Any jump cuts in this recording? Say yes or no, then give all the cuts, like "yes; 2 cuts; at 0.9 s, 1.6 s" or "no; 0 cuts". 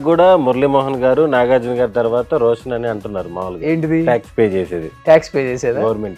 no; 0 cuts